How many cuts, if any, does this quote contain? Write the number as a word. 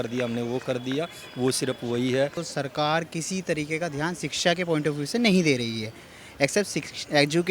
one